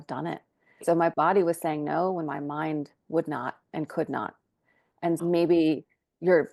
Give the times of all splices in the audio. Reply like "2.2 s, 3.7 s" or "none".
0.8 s, 5.2 s